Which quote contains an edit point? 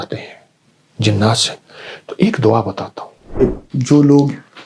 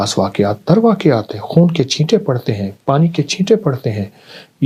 first; 1 cut; at 3.4 s

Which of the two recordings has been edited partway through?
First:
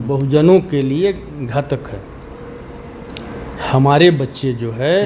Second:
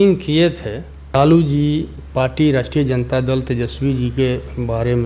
second; 1 cut; at 1.1 s

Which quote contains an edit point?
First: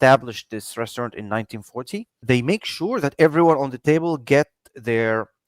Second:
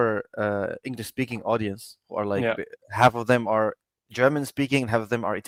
first; 1 cut; at 2.2 s

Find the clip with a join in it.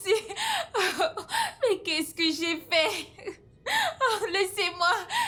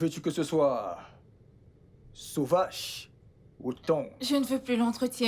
second; 1 cut; at 4.2 s

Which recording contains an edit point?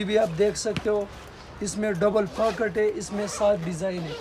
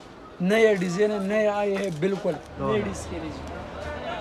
second; 1 cut; at 2.5 s

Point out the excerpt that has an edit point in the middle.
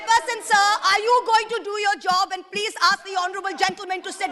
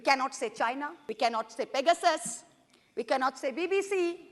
second; 1 cut; at 1.0 s

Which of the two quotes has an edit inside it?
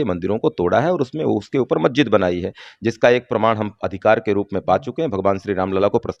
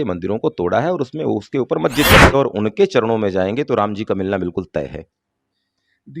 second; 1 cut; at 2.3 s

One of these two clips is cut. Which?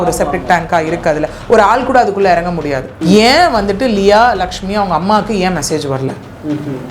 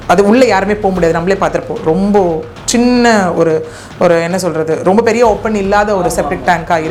first; 1 cut; at 2.9 s

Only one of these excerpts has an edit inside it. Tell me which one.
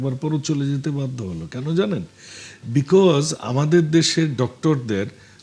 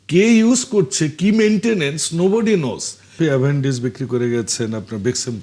second; 1 cut; at 3.1 s

